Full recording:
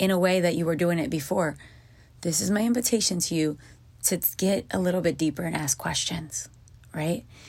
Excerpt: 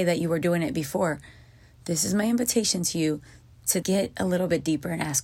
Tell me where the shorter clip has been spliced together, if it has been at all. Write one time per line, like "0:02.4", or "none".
0:03.8

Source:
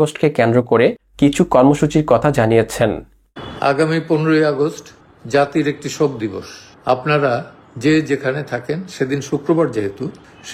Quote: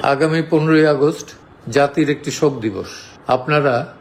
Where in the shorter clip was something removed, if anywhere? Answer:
none

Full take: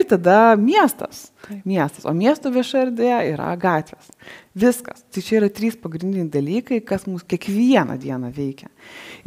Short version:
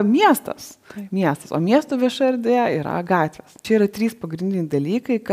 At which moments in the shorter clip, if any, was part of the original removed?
0:03.5

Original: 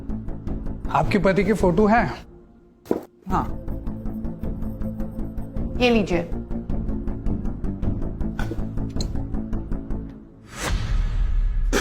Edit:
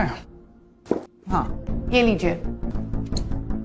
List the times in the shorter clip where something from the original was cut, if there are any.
0:01.6
0:02.7

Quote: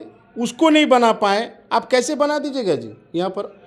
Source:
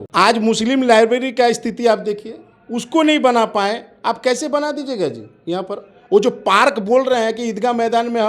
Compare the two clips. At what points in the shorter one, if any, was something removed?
none

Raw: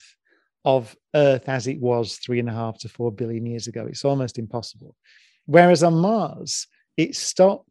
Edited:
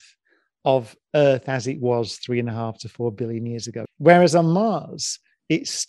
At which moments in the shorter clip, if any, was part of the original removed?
0:03.9

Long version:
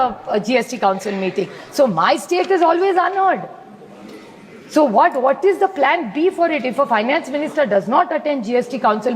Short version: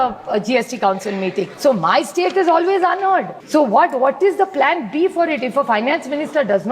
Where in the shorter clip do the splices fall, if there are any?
0:01.5
0:03.4

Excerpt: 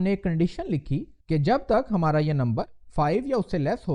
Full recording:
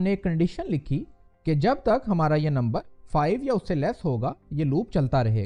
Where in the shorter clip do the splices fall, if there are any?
0:01.1

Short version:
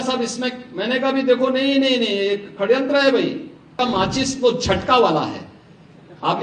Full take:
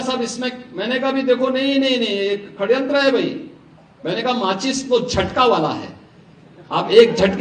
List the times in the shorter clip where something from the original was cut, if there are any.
0:03.7

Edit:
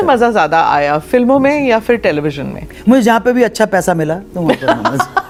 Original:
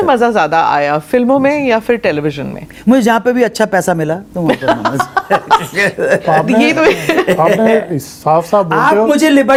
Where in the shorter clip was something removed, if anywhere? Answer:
none

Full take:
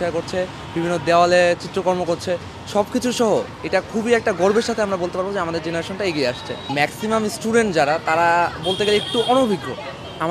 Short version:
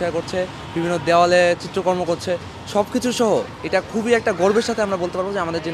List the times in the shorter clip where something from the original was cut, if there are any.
none

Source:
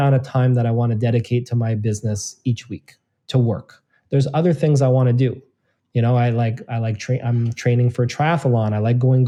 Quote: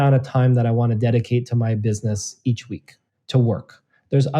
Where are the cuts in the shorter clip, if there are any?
none

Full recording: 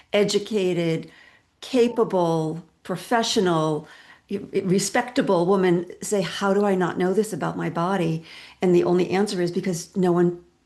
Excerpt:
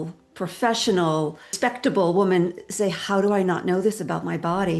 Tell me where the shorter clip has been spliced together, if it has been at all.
0:01.5

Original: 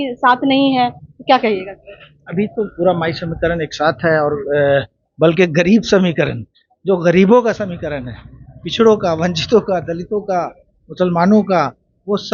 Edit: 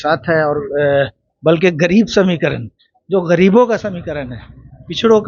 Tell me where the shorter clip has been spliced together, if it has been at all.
none

